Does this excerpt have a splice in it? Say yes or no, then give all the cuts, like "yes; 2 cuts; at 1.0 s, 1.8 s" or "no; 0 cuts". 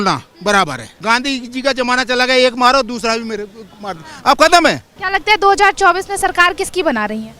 yes; 2 cuts; at 0.9 s, 4.9 s